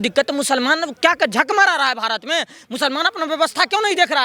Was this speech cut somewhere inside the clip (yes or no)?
no